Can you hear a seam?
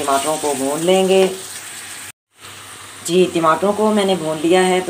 no; 0 cuts

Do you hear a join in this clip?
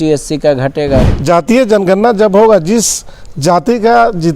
yes; 1 cut; at 1.1 s

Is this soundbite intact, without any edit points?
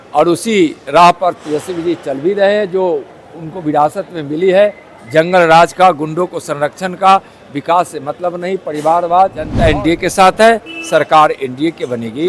no; 1 cut; at 9.5 s

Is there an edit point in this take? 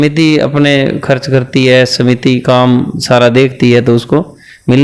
no; 0 cuts

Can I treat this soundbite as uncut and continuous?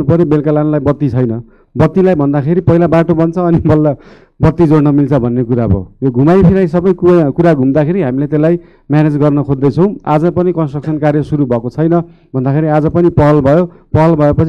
yes; 0 cuts

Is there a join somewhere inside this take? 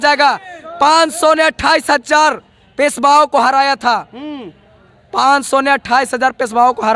no; 0 cuts

